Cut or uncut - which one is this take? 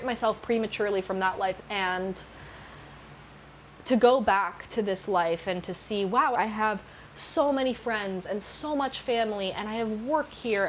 cut